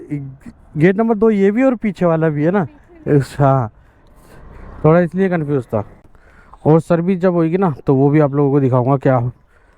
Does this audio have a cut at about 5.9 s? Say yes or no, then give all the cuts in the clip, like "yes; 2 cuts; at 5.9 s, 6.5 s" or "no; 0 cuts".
yes; 1 cut; at 5.9 s